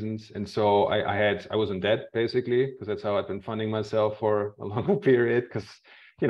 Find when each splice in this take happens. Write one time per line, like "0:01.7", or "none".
none